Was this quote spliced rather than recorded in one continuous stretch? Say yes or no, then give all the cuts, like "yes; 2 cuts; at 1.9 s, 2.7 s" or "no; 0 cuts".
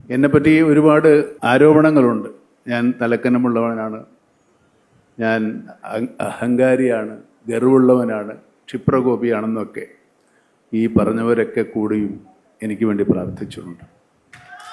yes; 1 cut; at 1.4 s